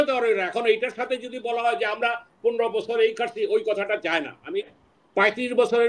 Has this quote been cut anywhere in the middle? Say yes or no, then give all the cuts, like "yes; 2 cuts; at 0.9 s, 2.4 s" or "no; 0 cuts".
yes; 1 cut; at 4.8 s